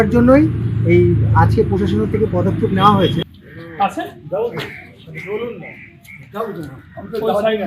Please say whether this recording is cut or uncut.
cut